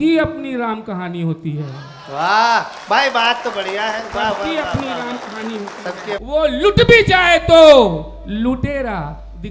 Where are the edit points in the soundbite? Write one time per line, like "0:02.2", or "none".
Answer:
0:06.1